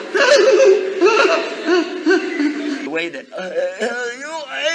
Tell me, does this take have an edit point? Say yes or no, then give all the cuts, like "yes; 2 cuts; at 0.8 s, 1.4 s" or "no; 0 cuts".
yes; 1 cut; at 2.9 s